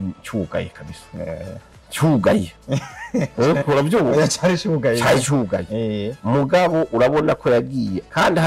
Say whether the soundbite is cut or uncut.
uncut